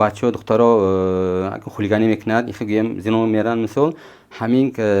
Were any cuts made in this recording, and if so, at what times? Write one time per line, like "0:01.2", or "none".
none